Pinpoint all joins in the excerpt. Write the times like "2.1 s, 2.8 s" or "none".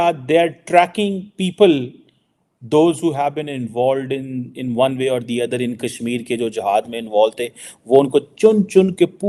none